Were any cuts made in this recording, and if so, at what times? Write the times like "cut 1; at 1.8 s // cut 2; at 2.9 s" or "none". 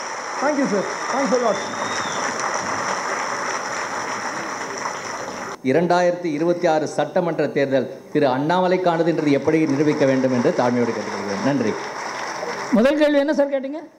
cut 1; at 5.4 s